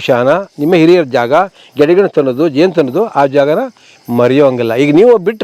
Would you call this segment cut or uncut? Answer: uncut